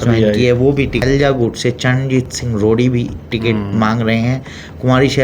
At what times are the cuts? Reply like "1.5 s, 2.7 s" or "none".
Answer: 1.0 s